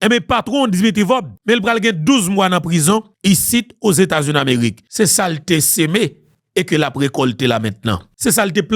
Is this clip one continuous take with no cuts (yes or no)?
yes